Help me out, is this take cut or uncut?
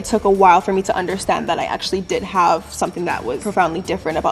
cut